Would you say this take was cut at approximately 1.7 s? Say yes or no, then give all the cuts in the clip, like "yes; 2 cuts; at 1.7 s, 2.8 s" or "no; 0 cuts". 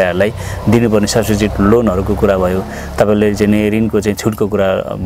no; 0 cuts